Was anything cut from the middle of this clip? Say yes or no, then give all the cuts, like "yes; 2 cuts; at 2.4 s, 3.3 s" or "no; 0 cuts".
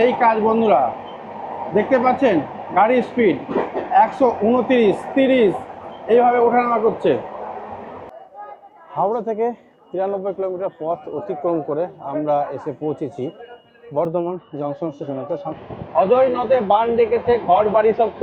yes; 2 cuts; at 8.1 s, 15.5 s